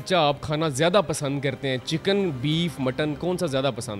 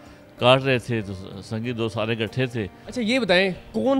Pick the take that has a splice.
second; 1 cut; at 2.8 s

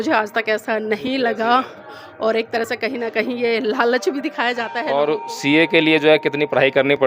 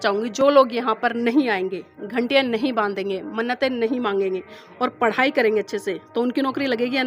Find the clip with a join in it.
first; 1 cut; at 4.7 s

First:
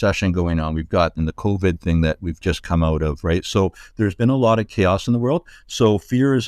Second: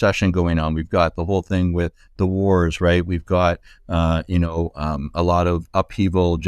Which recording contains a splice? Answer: first; 1 cut; at 1.2 s

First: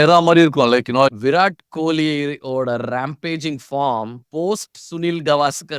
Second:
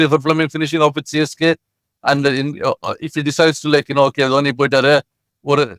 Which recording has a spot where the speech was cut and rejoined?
first; 1 cut; at 1.1 s

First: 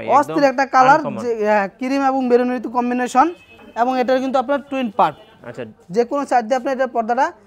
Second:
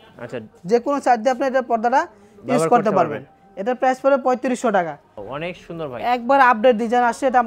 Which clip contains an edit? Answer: second; 1 cut; at 5.2 s

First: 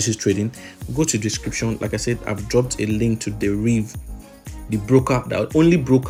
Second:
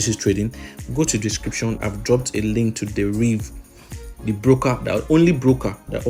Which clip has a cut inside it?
second; 1 cut; at 1.8 s

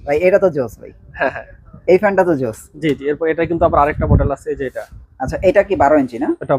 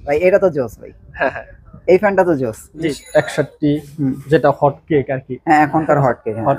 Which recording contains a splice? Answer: second; 1 cut; at 3.0 s

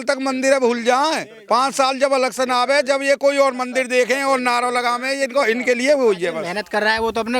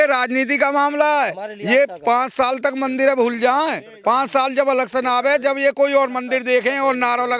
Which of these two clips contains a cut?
first; 1 cut; at 6.4 s

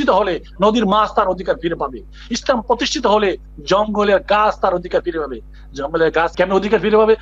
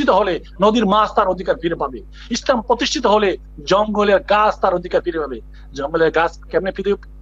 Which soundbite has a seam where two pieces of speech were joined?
first; 1 cut; at 6.3 s

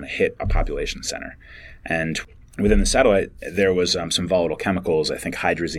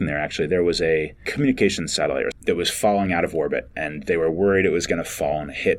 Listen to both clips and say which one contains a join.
second; 2 cuts; at 1.2 s, 2.4 s

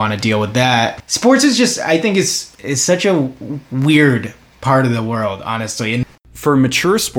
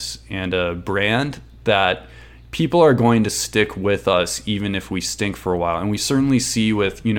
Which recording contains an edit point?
first; 3 cuts; at 1.0 s, 2.5 s, 6.0 s

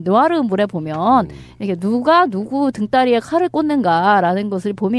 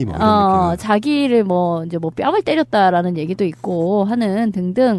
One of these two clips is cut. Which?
second; 1 cut; at 0.9 s

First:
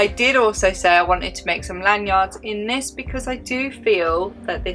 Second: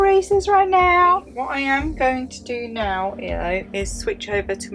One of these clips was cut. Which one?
second; 1 cut; at 1.3 s

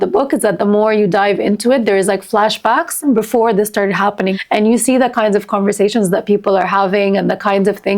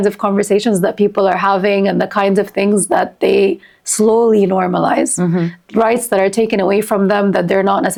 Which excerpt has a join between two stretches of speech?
first; 2 cuts; at 3.0 s, 4.3 s

